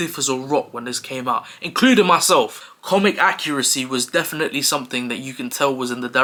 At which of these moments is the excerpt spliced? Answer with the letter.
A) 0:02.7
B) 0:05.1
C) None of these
C